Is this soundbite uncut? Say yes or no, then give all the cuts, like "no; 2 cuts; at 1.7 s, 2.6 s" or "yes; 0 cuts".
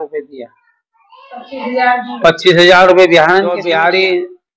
no; 1 cut; at 3.6 s